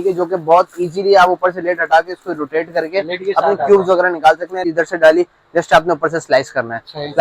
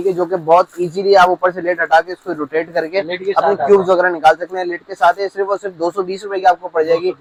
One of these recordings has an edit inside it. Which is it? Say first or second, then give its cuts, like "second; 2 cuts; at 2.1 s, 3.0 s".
first; 1 cut; at 4.6 s